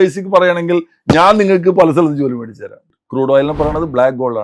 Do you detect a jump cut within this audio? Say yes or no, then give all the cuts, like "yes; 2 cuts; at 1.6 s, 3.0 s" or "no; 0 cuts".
yes; 1 cut; at 3.0 s